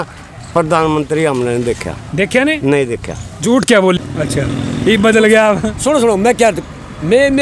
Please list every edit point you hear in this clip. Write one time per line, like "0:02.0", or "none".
0:04.0